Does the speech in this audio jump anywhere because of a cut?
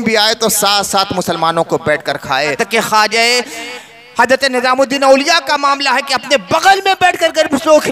yes; 1 cut; at 2.6 s

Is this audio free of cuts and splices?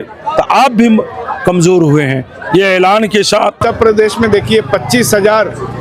no; 1 cut; at 3.7 s

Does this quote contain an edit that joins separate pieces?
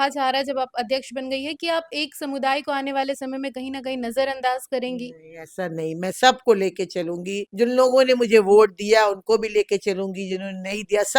yes; 1 cut; at 7.4 s

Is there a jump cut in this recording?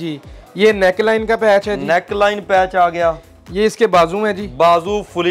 no; 0 cuts

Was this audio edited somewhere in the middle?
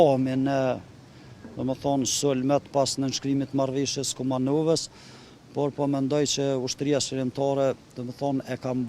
no; 0 cuts

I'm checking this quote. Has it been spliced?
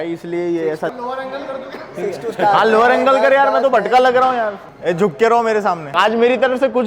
yes; 3 cuts; at 0.9 s, 4.7 s, 5.9 s

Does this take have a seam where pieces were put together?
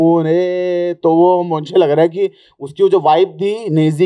no; 0 cuts

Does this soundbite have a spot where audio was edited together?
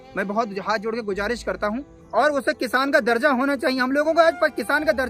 yes; 1 cut; at 1.9 s

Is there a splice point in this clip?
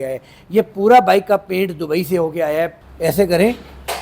yes; 1 cut; at 2.8 s

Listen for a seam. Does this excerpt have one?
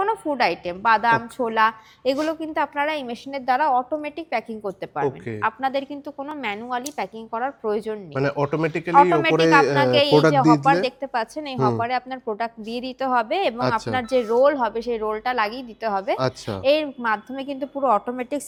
no; 0 cuts

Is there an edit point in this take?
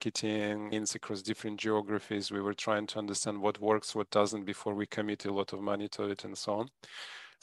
no; 0 cuts

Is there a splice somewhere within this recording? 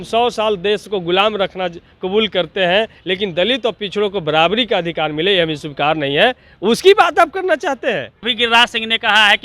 yes; 2 cuts; at 3.0 s, 8.3 s

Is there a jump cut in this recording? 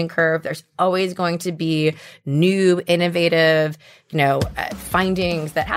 no; 0 cuts

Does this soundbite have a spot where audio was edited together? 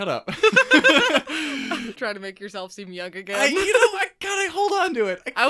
yes; 1 cut; at 1.9 s

